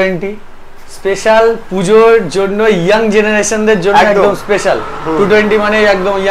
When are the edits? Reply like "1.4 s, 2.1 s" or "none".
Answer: none